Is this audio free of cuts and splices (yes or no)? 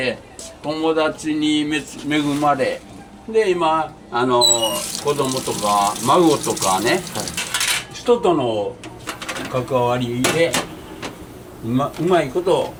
yes